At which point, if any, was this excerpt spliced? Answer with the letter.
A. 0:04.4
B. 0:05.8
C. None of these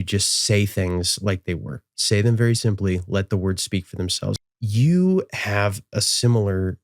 A